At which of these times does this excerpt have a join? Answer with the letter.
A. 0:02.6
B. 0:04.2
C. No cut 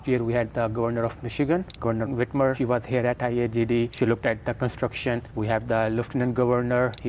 C